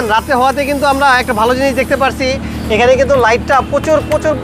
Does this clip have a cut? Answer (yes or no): no